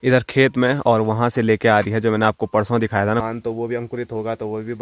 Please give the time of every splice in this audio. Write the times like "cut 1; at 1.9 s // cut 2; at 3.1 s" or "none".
cut 1; at 3.2 s